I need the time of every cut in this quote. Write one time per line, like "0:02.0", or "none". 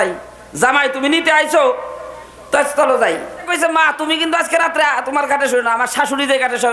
0:03.4